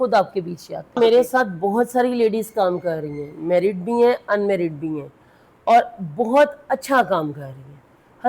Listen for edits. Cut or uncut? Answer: cut